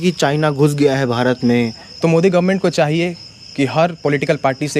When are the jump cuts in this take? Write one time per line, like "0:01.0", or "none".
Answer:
0:01.8